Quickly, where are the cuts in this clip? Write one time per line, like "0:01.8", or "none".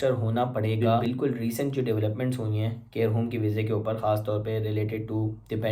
0:01.0

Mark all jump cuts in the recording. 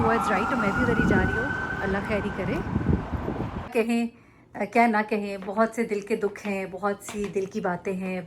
0:03.7

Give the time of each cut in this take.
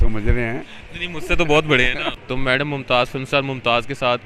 0:02.1

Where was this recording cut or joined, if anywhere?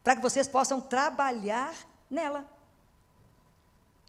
none

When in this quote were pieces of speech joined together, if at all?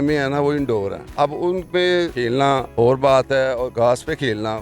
0:01.0
0:02.2
0:03.7

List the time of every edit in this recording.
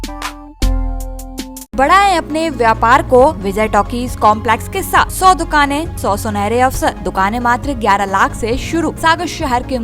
0:01.7
0:03.4
0:05.1
0:05.9
0:07.0
0:09.0

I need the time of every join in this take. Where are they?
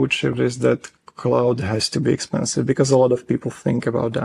none

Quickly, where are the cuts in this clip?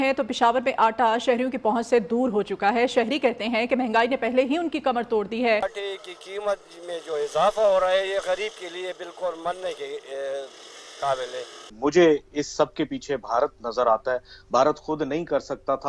0:05.7
0:11.6

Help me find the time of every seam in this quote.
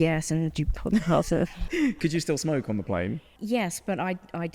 0:01.6
0:03.3

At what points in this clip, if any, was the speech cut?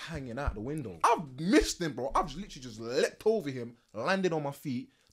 0:01.0

